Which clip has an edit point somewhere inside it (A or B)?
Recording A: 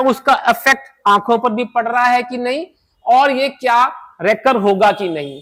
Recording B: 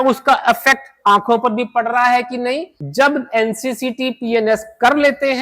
B